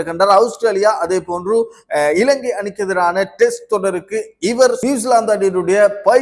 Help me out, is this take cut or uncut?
cut